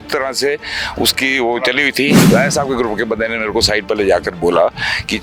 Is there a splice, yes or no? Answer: yes